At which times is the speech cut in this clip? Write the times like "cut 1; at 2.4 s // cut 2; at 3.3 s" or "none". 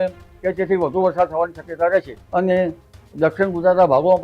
cut 1; at 2.2 s